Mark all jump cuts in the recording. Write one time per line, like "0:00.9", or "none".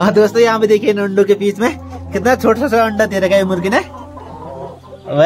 none